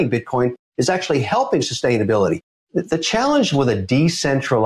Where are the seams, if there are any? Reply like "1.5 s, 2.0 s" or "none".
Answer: 2.5 s